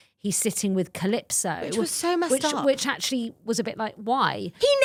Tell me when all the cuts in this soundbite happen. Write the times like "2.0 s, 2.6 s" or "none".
none